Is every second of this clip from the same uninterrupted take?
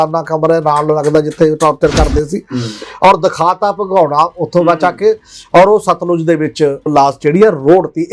no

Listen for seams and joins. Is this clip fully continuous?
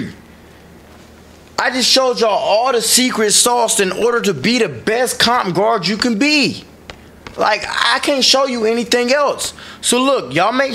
yes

